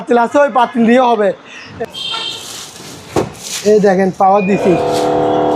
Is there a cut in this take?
yes; 1 cut; at 1.6 s

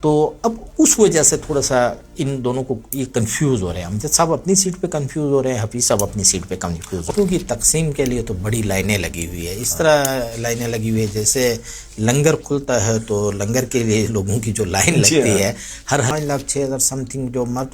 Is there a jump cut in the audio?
yes; 2 cuts; at 7.1 s, 16.1 s

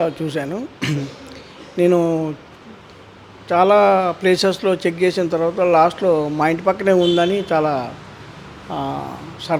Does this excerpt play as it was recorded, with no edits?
yes; 0 cuts

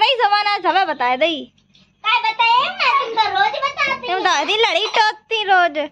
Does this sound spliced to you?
no; 0 cuts

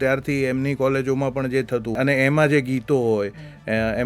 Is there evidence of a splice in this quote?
yes; 1 cut; at 1.9 s

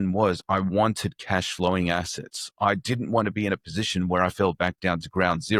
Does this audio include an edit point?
no; 0 cuts

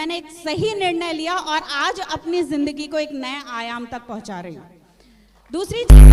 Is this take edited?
no; 0 cuts

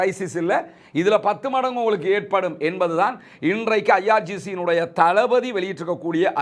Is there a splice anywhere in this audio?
no; 0 cuts

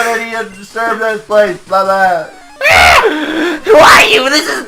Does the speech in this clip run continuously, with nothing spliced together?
yes; 0 cuts

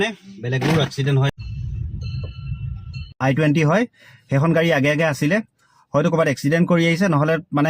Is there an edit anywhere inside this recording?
yes; 2 cuts; at 1.3 s, 3.1 s

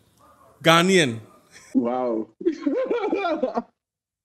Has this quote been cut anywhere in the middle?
no; 0 cuts

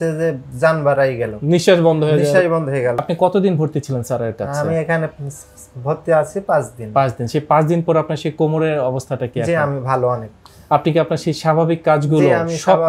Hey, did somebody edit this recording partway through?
yes; 1 cut; at 3.0 s

